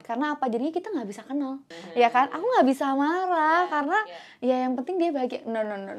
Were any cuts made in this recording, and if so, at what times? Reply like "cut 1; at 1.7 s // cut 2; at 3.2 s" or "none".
cut 1; at 1.8 s